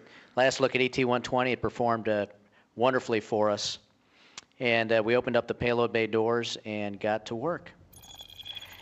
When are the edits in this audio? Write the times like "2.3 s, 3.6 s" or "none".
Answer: none